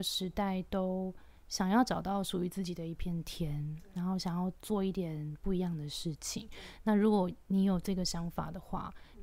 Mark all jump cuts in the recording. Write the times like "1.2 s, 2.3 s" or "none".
none